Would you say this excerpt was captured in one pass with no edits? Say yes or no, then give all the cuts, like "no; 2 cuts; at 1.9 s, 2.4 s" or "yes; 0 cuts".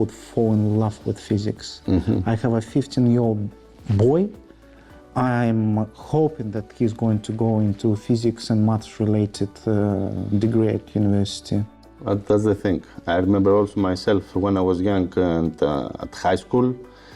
yes; 0 cuts